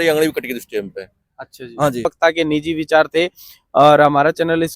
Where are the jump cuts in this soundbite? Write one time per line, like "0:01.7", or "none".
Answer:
0:02.0